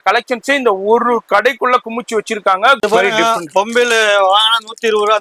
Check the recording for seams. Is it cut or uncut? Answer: cut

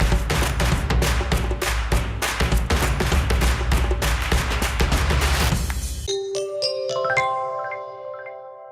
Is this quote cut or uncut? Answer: cut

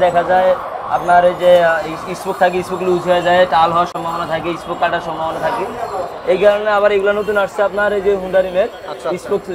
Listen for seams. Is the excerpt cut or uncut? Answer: uncut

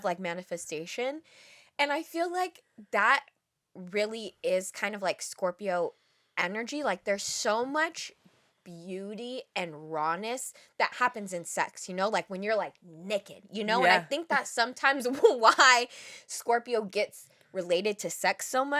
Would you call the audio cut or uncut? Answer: uncut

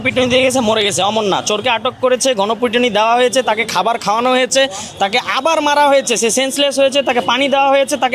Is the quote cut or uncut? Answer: uncut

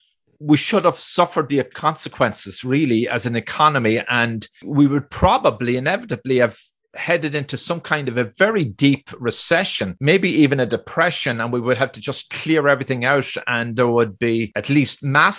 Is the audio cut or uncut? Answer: cut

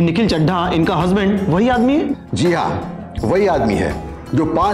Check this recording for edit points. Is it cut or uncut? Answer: uncut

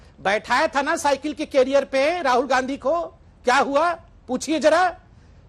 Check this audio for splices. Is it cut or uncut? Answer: uncut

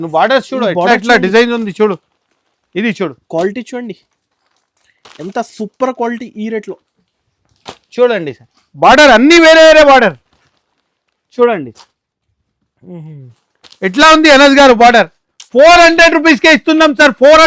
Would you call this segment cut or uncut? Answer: uncut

